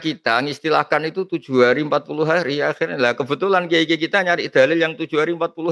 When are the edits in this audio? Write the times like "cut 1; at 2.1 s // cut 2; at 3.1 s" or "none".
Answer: none